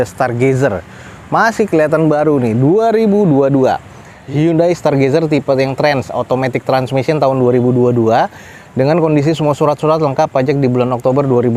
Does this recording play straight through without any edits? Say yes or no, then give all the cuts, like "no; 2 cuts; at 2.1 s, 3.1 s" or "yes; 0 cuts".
yes; 0 cuts